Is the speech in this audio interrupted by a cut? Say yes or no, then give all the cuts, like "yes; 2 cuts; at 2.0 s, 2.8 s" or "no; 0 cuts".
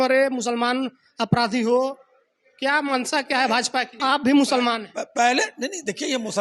yes; 1 cut; at 4.0 s